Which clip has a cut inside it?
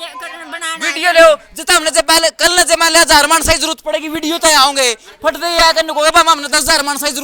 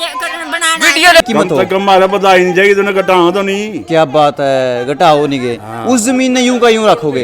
second; 1 cut; at 1.2 s

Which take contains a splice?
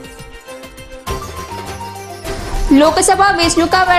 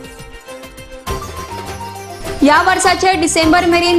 second; 1 cut; at 2.1 s

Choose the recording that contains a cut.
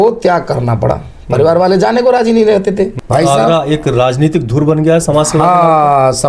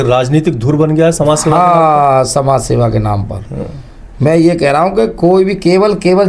first; 1 cut; at 3.0 s

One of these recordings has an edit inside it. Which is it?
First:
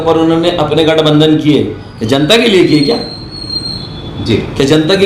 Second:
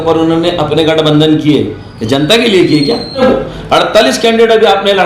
second; 1 cut; at 3.2 s

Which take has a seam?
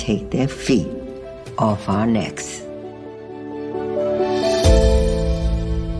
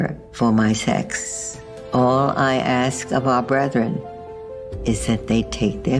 first; 1 cut; at 2.4 s

